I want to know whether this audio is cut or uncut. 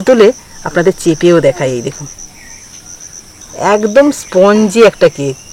cut